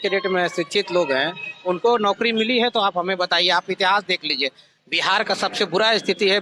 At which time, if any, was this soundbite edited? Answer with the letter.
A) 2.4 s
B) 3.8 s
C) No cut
C